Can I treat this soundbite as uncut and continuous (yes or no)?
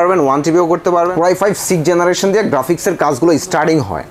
no